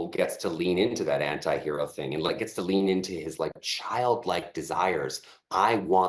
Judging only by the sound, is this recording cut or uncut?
uncut